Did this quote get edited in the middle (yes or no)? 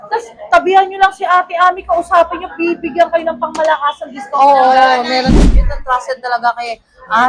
yes